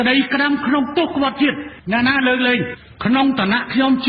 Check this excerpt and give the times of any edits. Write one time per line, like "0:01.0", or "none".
0:01.7
0:02.7